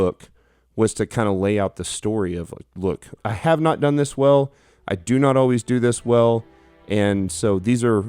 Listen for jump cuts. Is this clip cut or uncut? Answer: cut